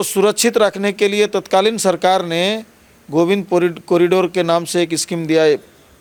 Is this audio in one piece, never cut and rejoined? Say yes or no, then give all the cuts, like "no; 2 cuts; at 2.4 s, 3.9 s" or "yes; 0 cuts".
yes; 0 cuts